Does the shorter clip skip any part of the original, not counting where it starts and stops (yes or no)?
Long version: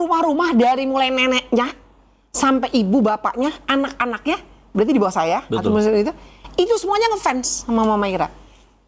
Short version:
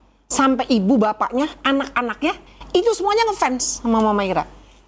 yes